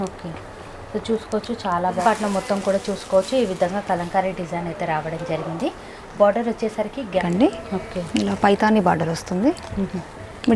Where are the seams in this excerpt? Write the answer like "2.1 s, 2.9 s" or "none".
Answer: 2.0 s, 7.2 s

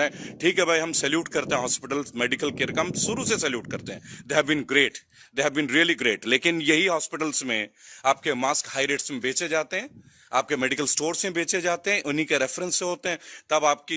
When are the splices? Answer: none

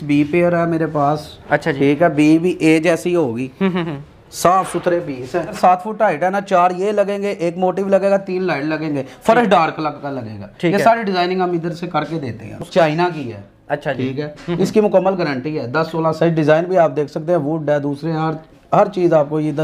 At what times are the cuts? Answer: 5.5 s, 12.6 s

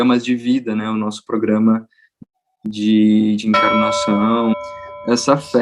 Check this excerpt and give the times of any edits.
4.6 s

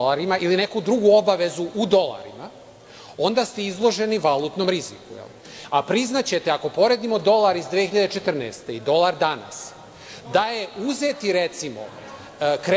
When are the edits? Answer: 6.0 s

